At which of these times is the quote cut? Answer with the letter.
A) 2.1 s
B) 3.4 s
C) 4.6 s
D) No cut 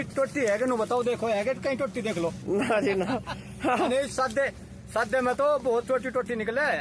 D